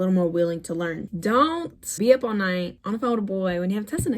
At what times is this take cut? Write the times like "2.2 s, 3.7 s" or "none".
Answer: 1.1 s, 1.8 s